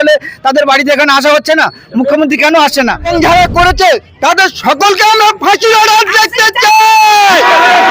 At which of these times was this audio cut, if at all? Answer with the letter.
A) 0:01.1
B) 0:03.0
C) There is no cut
B